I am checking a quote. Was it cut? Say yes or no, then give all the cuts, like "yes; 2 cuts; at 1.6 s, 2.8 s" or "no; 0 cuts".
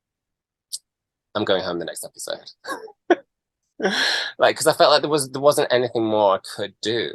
no; 0 cuts